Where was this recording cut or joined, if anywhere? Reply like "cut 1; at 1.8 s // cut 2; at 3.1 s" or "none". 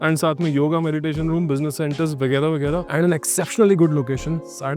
cut 1; at 2.9 s